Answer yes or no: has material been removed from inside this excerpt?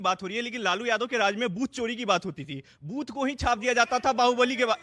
no